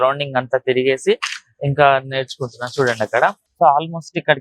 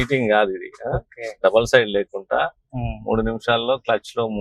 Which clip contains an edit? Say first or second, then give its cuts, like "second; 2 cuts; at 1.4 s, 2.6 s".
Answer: first; 1 cut; at 3.4 s